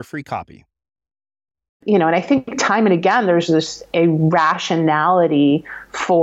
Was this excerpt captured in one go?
no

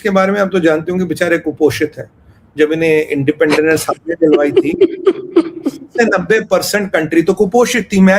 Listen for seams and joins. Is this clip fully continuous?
yes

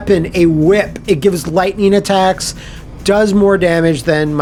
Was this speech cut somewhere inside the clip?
no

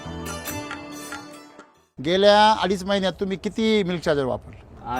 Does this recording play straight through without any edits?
no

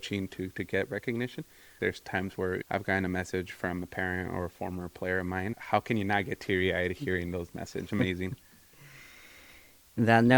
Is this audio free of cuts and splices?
no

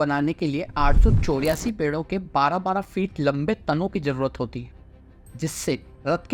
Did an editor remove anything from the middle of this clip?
no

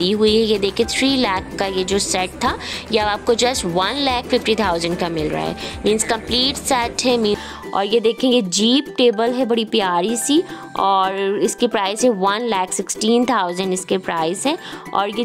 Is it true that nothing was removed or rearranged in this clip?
no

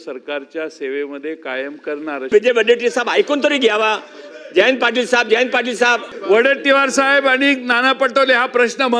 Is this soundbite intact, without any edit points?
no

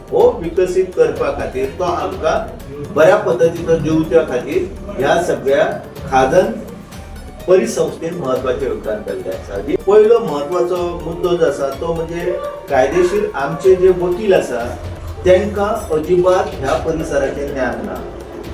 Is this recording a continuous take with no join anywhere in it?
no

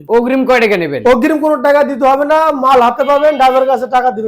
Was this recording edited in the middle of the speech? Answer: no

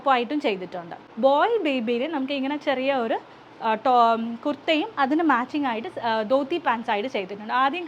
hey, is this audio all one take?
no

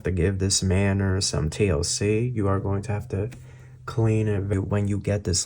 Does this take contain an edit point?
yes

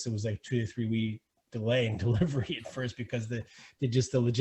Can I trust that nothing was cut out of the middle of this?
no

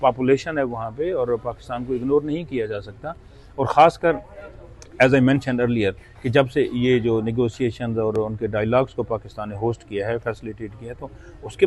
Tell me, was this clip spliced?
no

